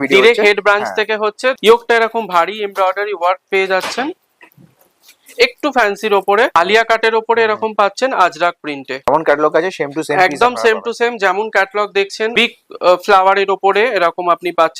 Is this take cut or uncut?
cut